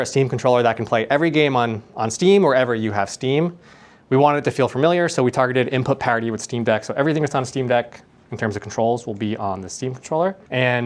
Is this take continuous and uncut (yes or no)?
yes